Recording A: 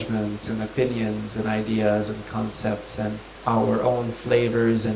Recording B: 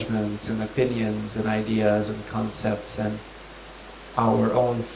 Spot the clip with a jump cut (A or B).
A